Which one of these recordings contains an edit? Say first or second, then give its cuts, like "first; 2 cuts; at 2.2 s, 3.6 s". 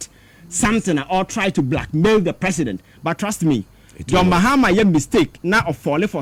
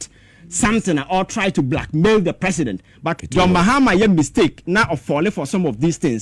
second; 1 cut; at 3.2 s